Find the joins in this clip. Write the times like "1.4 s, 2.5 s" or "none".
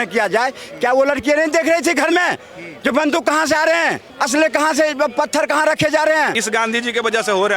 4.1 s, 6.4 s